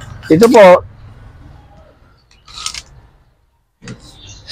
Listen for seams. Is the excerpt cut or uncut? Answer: uncut